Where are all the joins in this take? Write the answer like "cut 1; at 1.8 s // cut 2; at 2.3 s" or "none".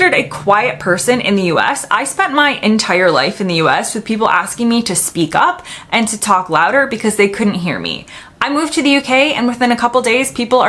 none